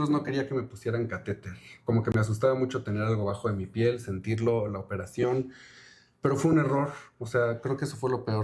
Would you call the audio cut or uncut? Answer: uncut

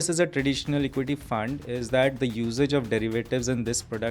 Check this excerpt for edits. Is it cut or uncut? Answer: uncut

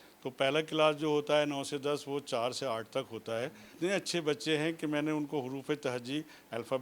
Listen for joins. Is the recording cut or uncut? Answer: cut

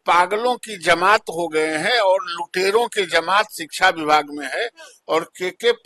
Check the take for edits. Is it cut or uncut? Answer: uncut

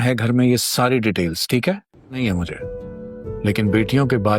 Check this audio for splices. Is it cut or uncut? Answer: cut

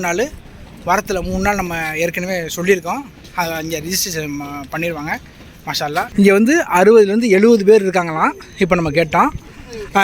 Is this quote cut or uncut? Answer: cut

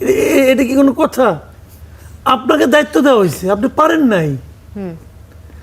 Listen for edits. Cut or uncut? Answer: uncut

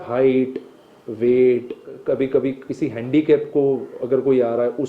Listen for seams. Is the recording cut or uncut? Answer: cut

